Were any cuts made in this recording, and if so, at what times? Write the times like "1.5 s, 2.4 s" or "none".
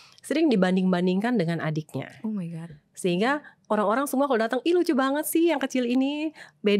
none